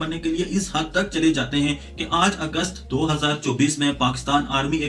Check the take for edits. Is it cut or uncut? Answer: uncut